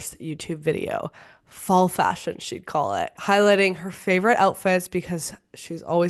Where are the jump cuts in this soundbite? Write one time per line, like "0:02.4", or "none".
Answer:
none